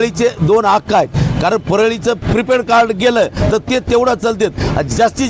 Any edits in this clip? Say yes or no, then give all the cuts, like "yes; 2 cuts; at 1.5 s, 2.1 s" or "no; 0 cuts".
no; 0 cuts